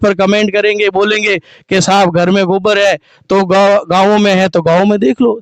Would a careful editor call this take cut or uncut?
uncut